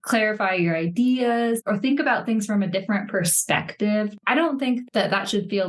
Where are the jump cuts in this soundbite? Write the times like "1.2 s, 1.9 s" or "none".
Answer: 1.6 s, 4.2 s